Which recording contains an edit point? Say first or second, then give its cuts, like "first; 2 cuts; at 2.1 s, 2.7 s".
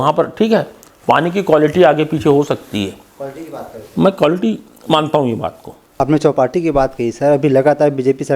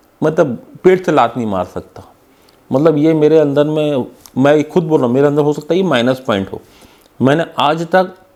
first; 1 cut; at 6.0 s